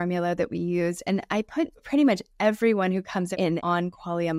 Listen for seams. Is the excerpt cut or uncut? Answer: cut